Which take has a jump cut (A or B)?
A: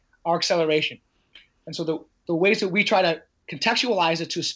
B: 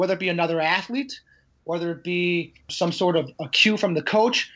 B